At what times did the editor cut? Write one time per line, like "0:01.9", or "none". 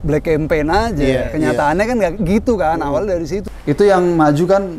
0:03.4